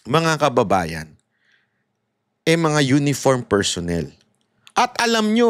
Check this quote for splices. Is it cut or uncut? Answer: uncut